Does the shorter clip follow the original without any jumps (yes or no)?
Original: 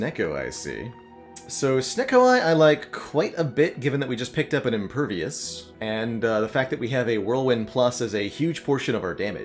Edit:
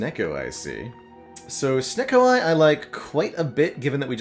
yes